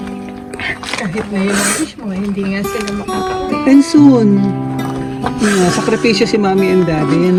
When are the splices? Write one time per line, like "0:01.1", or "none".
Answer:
none